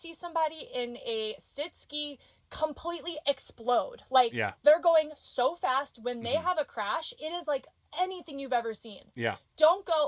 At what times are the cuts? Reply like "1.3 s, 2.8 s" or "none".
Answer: none